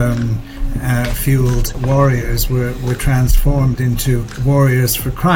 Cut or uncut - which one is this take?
cut